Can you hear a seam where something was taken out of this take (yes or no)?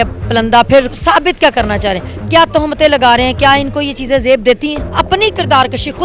yes